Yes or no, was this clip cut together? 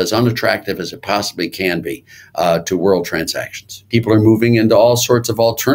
yes